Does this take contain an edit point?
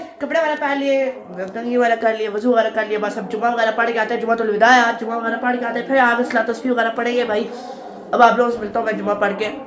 no; 0 cuts

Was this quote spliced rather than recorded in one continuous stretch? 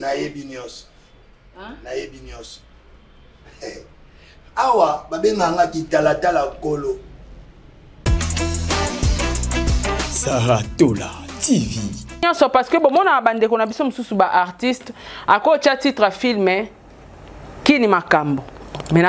yes; 1 cut; at 12.2 s

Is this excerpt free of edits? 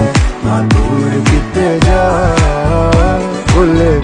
yes; 0 cuts

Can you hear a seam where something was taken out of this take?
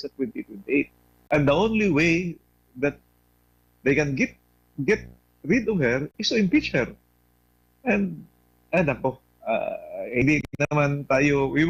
no; 0 cuts

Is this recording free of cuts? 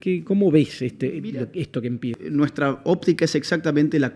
no; 1 cut; at 2.2 s

